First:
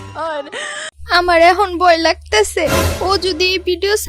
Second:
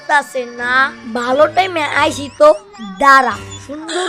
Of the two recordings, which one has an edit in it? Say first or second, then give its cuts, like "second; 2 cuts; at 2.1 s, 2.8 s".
first; 1 cut; at 0.9 s